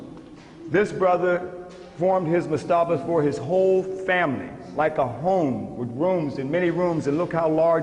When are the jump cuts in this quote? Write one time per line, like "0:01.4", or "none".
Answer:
0:03.0